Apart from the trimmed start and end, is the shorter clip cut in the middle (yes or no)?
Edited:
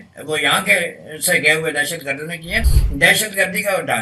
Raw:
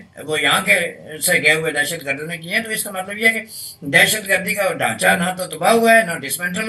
yes